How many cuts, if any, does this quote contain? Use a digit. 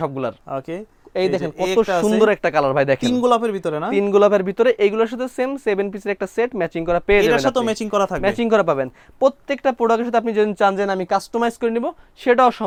0